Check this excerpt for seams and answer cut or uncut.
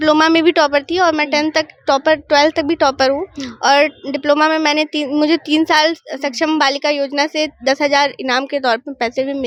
uncut